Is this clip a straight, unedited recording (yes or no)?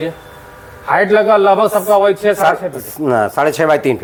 yes